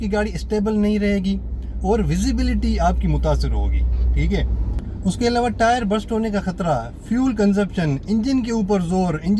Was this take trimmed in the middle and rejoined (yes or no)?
no